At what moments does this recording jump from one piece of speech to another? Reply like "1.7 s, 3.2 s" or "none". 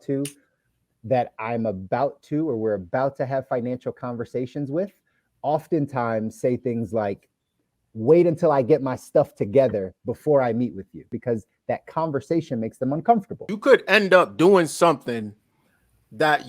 11.1 s, 13.4 s